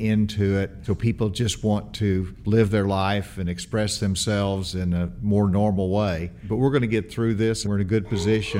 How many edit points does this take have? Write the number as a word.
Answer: four